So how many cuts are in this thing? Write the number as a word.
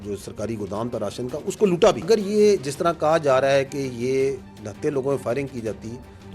one